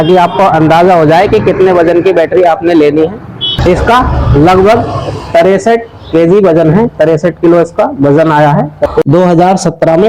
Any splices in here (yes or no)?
yes